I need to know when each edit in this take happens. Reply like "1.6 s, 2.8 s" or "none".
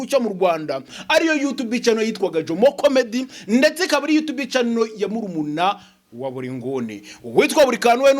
0.9 s